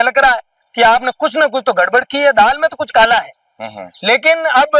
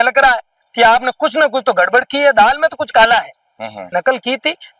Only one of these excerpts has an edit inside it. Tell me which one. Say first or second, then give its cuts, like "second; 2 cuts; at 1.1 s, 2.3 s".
second; 1 cut; at 3.8 s